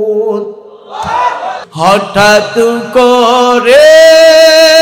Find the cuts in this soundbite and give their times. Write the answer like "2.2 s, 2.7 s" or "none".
1.6 s